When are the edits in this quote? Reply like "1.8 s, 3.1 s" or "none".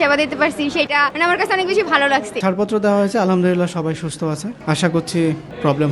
0.9 s, 2.4 s